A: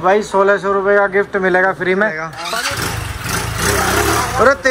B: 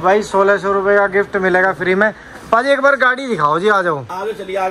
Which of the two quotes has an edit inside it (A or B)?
A